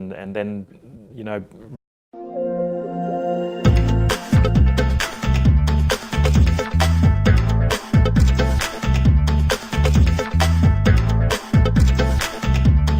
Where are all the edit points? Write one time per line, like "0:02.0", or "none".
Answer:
none